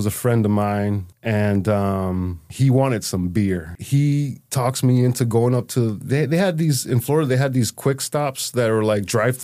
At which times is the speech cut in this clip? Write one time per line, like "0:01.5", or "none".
0:01.1
0:02.4
0:03.7
0:04.4